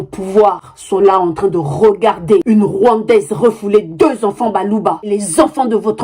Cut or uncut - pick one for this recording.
cut